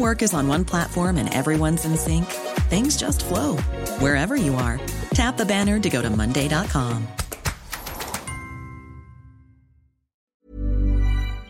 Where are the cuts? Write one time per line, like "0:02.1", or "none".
0:10.2